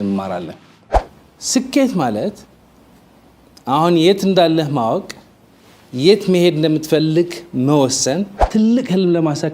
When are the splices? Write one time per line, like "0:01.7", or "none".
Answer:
0:00.9
0:08.4